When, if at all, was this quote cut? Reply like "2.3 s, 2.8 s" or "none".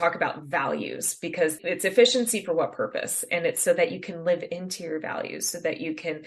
1.6 s